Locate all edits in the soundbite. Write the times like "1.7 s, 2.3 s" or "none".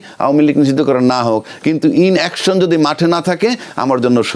none